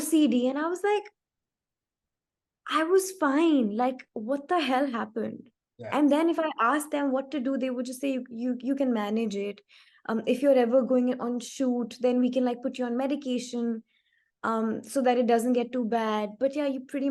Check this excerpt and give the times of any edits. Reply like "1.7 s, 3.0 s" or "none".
none